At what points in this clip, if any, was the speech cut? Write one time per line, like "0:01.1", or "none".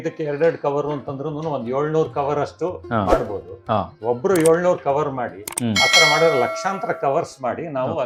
none

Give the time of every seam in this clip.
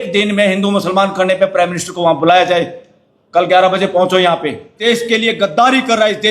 0:04.7

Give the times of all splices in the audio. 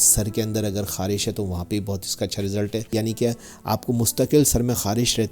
0:02.9

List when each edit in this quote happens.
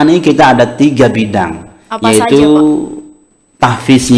none

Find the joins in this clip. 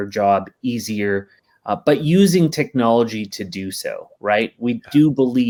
none

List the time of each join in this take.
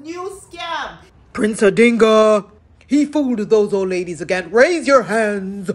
0:01.0

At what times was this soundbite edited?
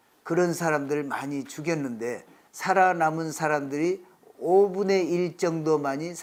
none

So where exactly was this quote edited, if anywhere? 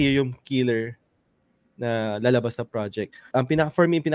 0:03.2

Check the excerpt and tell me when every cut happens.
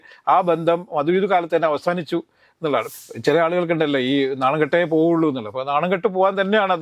0:02.9

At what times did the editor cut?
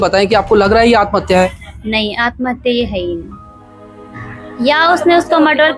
none

